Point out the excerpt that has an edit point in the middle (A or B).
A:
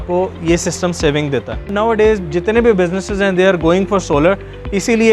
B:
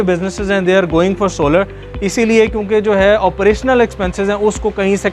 A